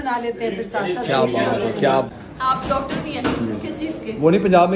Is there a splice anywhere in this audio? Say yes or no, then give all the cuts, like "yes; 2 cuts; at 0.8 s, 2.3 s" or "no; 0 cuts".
yes; 1 cut; at 2.1 s